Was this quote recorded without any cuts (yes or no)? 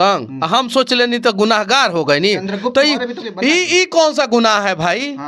yes